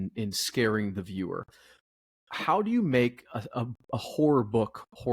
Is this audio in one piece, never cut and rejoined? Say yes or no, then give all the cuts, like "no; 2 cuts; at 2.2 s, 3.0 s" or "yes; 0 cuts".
yes; 0 cuts